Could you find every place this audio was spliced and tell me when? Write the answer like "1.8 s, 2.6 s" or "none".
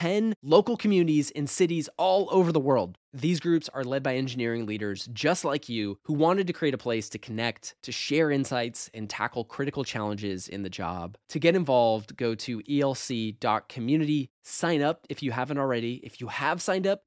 none